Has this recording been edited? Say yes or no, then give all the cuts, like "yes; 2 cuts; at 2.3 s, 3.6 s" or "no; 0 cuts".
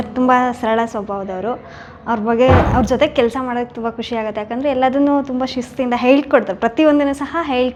no; 0 cuts